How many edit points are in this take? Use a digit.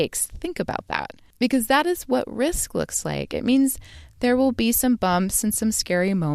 1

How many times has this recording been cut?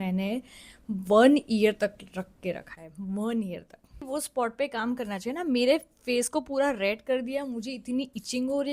1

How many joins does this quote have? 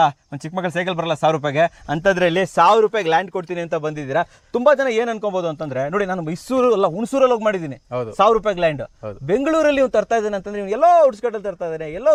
0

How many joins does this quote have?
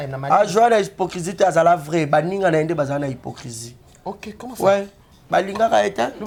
0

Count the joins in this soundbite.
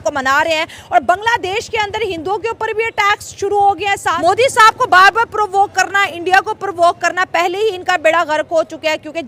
1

